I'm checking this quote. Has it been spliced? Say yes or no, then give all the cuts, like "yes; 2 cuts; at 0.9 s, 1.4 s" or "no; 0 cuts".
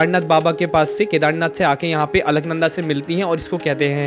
no; 0 cuts